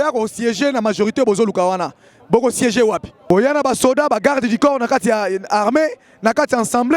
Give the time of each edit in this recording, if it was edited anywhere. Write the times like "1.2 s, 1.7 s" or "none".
3.3 s